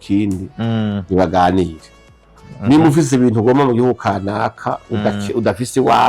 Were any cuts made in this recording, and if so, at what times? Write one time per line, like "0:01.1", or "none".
none